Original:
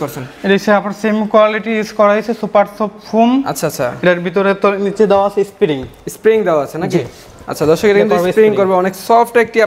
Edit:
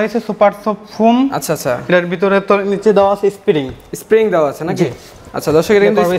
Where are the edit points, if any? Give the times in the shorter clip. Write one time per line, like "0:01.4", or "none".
none